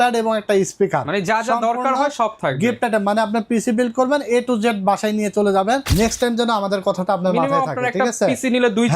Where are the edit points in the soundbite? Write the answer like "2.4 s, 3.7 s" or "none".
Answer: 5.9 s